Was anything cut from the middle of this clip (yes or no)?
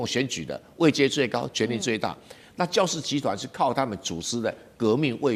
no